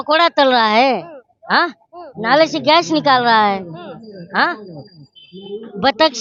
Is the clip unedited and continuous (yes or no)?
yes